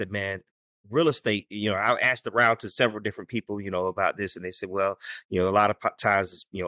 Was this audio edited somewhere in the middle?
no; 0 cuts

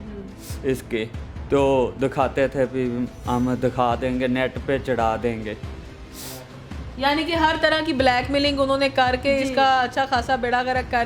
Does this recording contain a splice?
no; 0 cuts

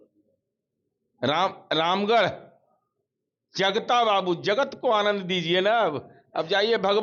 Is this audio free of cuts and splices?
yes; 0 cuts

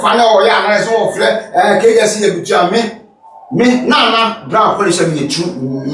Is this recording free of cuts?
yes; 0 cuts

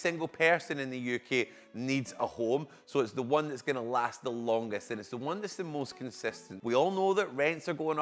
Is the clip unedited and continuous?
no; 1 cut; at 6.5 s

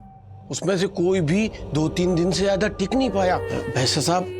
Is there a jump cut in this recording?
yes; 1 cut; at 3.4 s

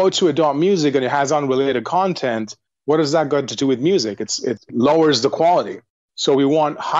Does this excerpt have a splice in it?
no; 0 cuts

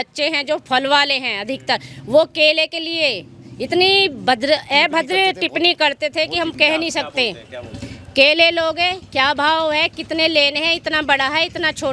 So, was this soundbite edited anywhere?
no; 0 cuts

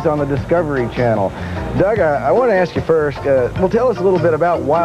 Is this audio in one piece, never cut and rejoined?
no; 1 cut; at 1.1 s

